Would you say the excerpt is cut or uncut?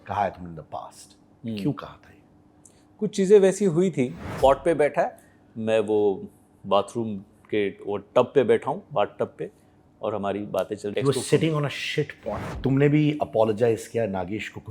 cut